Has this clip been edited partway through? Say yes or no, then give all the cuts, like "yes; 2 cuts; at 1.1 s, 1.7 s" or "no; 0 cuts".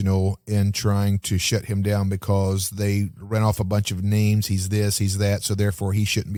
no; 0 cuts